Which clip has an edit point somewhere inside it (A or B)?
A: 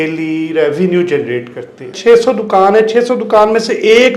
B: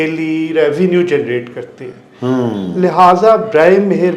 A